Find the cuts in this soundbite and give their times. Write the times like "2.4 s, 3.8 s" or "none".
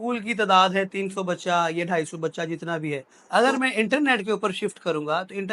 3.1 s